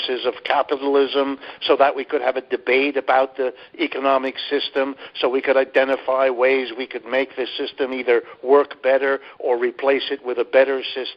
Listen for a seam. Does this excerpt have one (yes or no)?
no